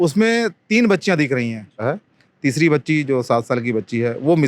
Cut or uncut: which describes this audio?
cut